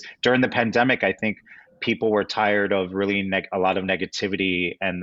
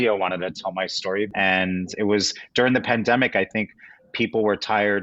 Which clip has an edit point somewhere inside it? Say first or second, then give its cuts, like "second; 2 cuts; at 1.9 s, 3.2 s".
second; 1 cut; at 1.3 s